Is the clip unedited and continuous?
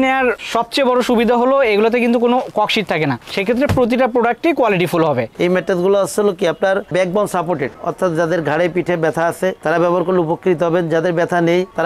no; 1 cut; at 5.3 s

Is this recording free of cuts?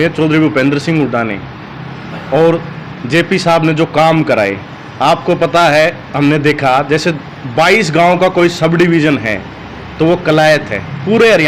yes; 0 cuts

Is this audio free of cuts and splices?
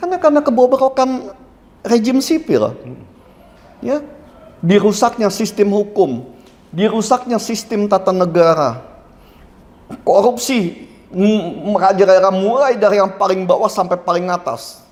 yes; 0 cuts

